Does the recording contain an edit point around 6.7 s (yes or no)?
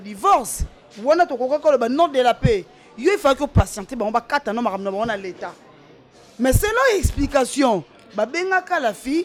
no